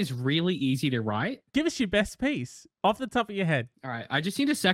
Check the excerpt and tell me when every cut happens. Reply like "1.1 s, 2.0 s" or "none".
1.4 s, 3.7 s